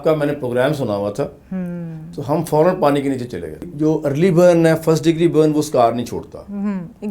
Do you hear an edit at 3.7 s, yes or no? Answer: yes